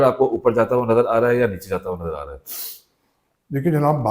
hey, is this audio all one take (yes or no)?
yes